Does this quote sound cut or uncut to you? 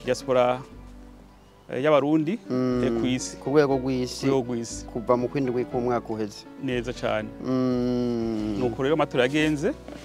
uncut